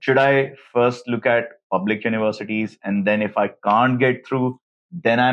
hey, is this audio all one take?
yes; 0 cuts

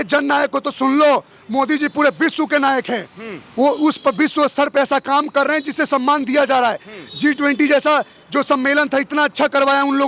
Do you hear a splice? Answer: no; 0 cuts

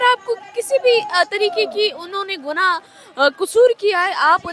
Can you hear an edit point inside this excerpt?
no; 0 cuts

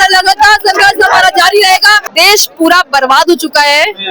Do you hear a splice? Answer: yes; 1 cut; at 2.0 s

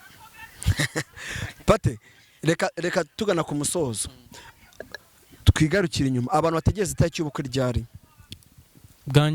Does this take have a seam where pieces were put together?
no; 0 cuts

